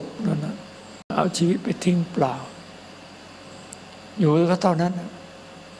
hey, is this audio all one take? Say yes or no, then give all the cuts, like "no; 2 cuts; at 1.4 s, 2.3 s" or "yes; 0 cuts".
no; 1 cut; at 1.1 s